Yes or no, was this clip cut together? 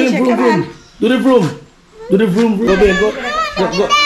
yes